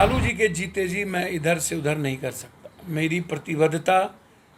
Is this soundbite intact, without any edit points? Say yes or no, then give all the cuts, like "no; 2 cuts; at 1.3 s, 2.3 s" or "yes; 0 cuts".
yes; 0 cuts